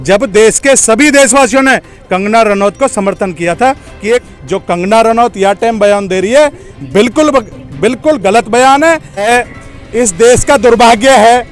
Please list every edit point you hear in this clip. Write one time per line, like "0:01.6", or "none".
0:04.2
0:09.3